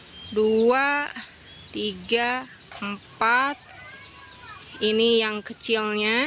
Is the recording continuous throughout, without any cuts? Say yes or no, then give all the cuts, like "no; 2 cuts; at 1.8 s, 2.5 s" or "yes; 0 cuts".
yes; 0 cuts